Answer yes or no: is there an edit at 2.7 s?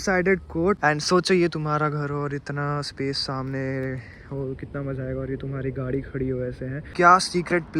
no